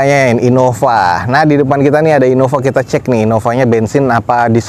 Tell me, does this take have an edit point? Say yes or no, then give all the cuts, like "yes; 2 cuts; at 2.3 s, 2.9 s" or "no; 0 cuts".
no; 0 cuts